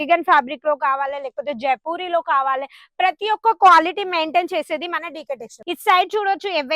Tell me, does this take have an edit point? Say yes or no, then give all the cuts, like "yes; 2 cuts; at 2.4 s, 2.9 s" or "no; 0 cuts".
yes; 1 cut; at 5.5 s